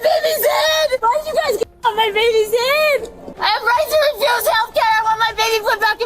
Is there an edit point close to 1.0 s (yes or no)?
yes